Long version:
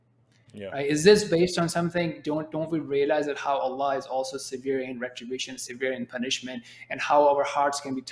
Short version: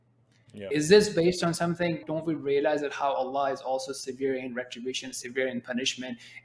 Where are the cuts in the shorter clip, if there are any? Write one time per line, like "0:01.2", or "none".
0:00.7
0:02.0

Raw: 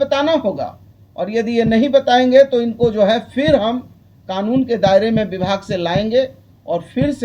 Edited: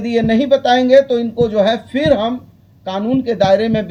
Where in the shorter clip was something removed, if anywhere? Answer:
none

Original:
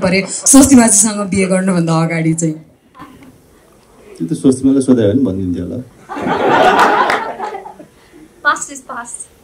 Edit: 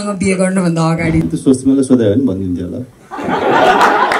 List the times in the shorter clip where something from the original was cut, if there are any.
0:01.2

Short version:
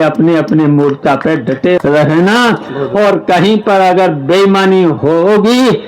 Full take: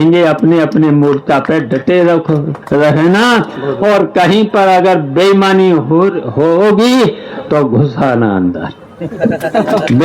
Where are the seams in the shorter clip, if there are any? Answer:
0:01.8
0:05.0

